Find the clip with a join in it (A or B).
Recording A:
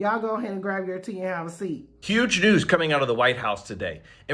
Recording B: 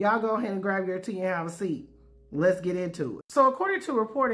A